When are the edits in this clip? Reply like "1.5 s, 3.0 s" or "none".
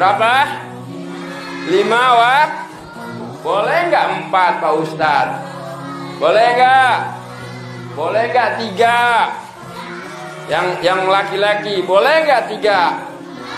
none